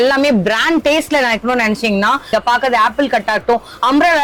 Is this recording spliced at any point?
yes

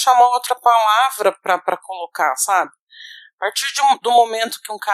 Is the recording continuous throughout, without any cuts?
yes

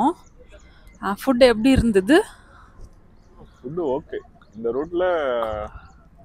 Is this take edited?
no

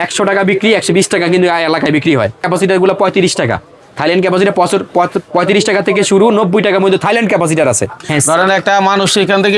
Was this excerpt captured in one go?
no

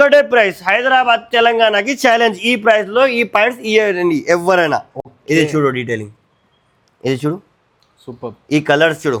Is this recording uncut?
yes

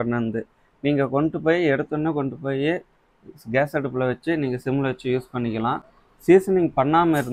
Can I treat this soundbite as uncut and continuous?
yes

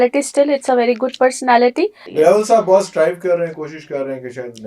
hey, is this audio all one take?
no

